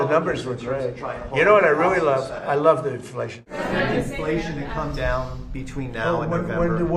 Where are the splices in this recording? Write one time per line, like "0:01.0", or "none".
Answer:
none